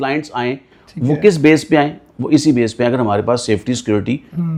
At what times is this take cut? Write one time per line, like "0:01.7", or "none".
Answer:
none